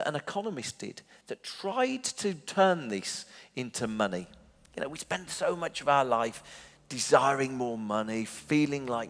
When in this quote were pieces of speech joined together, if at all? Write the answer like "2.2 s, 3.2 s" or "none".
none